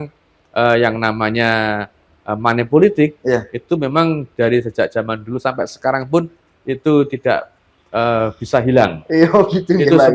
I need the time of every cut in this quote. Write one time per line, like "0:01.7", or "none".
none